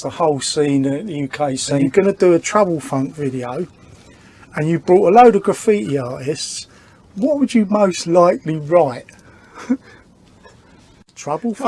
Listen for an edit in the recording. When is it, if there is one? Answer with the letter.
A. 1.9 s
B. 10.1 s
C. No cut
A